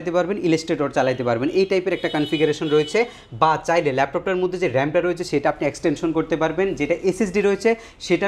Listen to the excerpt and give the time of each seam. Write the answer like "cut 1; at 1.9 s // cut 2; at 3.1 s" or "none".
none